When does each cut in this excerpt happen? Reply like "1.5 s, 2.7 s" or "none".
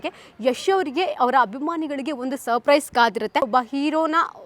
3.5 s